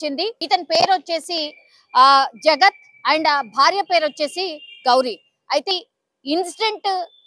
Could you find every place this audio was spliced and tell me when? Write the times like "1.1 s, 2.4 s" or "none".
5.7 s